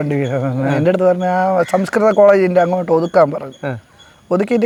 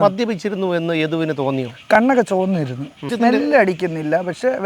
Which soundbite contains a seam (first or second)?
second